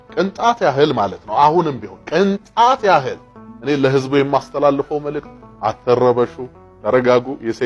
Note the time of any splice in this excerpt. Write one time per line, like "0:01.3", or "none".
none